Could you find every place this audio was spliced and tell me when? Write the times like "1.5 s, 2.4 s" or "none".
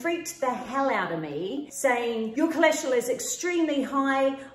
2.0 s